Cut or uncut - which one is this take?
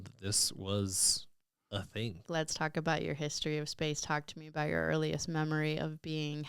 cut